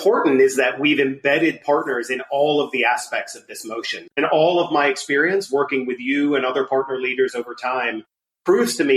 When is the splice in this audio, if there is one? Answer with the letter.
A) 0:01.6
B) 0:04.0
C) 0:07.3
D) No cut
B